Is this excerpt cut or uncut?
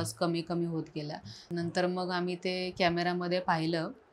cut